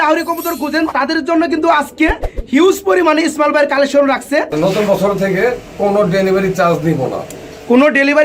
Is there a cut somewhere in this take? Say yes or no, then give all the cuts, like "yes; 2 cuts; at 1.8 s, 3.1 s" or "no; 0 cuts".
yes; 2 cuts; at 0.9 s, 4.5 s